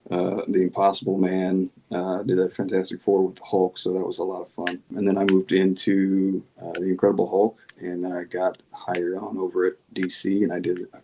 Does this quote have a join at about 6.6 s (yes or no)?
no